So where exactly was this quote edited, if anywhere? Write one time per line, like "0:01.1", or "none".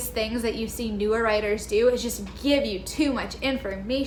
none